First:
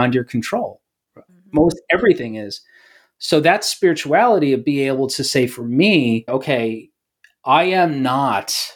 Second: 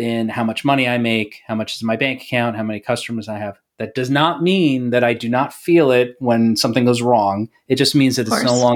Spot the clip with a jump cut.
first; 2 cuts; at 1.3 s, 6.3 s

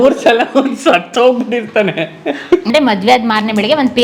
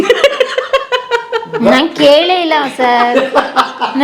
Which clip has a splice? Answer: first; 1 cut; at 2.7 s

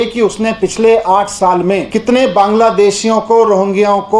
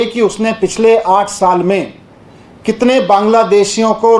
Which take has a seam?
first; 1 cut; at 1.9 s

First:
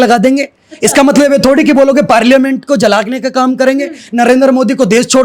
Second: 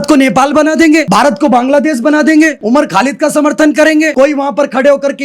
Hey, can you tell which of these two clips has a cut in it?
second; 3 cuts; at 1.1 s, 2.6 s, 4.1 s

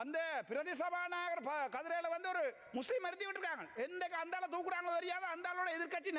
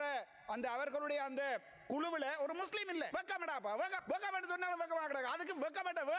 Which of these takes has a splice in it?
second; 2 cuts; at 3.1 s, 4.0 s

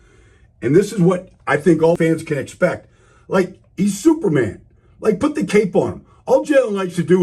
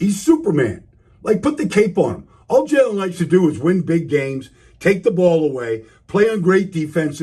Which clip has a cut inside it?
first; 1 cut; at 2.0 s

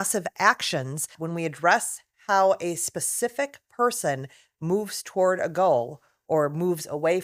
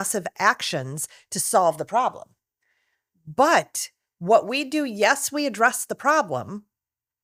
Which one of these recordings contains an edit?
first; 1 cut; at 1.2 s

